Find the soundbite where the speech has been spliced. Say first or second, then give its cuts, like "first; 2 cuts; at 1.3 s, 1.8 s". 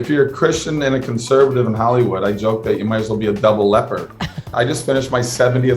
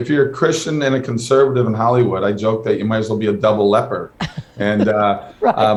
first; 1 cut; at 4.5 s